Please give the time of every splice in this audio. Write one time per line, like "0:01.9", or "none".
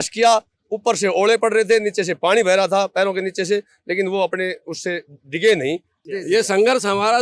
0:06.0

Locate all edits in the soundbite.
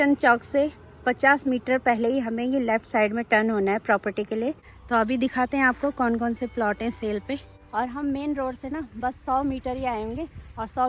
0:04.7
0:07.6

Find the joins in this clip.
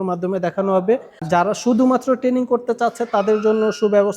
0:01.2

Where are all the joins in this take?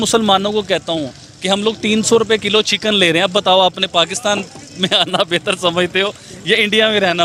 none

